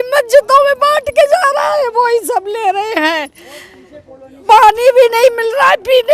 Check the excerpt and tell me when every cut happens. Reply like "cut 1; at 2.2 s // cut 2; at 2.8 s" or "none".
none